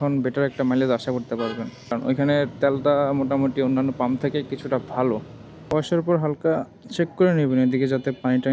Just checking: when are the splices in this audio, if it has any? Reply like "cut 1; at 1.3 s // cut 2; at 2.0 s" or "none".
cut 1; at 2.1 s // cut 2; at 5.7 s